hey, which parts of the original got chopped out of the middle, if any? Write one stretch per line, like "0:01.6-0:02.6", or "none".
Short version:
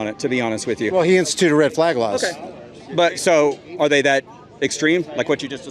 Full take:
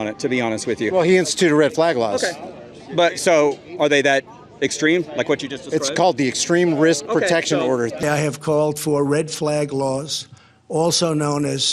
none